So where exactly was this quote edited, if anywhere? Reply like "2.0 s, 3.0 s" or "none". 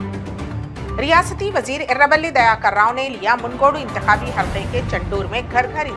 0.9 s